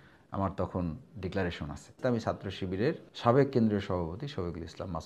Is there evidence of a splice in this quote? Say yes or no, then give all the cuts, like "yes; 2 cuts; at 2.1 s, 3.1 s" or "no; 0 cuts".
yes; 2 cuts; at 2.0 s, 3.1 s